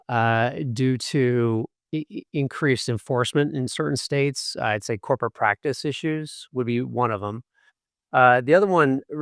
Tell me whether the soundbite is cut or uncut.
uncut